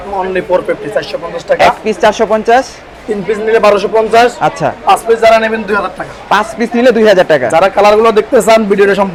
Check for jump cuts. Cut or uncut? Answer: uncut